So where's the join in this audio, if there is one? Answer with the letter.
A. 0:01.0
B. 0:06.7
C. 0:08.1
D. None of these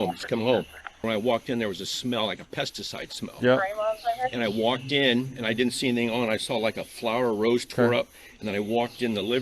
A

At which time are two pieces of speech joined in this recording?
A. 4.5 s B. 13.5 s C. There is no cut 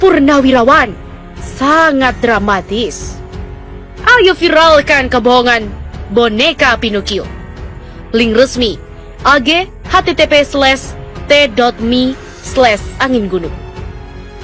B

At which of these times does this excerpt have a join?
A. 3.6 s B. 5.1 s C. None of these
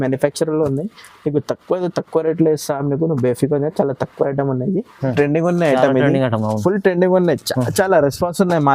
B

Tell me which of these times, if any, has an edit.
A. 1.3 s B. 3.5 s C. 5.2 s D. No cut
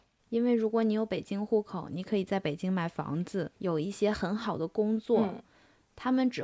B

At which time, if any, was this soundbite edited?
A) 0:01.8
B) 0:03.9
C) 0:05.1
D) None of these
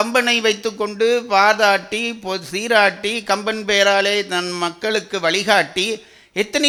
D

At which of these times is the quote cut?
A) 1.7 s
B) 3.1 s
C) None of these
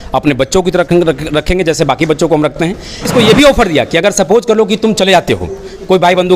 B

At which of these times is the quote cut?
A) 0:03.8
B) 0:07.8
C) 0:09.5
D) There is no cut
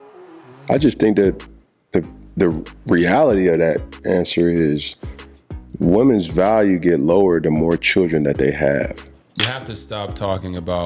C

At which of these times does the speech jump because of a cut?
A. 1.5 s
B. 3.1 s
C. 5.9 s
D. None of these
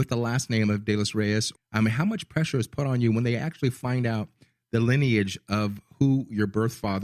A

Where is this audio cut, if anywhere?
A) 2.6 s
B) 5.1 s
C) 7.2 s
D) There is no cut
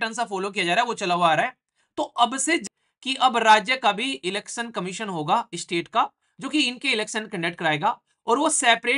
A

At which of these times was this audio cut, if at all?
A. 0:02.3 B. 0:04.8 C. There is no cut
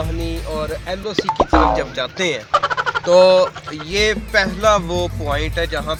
C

